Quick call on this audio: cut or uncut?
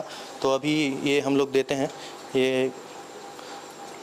uncut